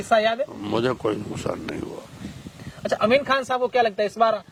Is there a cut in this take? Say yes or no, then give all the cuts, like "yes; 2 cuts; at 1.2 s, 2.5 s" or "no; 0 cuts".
no; 0 cuts